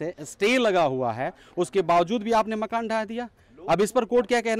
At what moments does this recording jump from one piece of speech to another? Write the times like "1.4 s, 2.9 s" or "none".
none